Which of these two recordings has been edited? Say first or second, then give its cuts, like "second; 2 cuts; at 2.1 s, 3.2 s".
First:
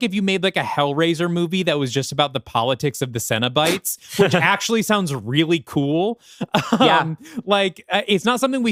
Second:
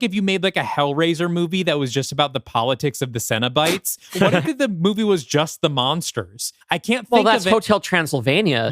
second; 2 cuts; at 4.2 s, 6.5 s